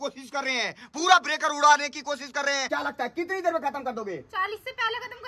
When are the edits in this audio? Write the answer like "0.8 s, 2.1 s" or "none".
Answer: 2.6 s